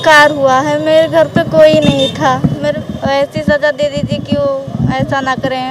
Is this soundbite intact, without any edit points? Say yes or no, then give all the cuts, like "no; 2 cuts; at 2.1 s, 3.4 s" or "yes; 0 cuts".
no; 1 cut; at 2.7 s